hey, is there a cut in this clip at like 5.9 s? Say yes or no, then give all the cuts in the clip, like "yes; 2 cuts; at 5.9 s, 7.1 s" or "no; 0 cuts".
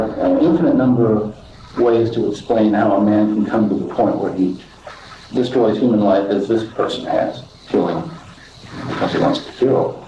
no; 1 cut; at 7.5 s